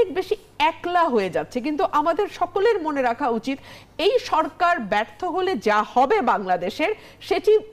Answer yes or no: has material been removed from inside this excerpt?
no